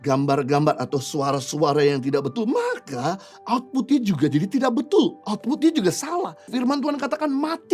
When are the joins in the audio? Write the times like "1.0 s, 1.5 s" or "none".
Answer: 6.5 s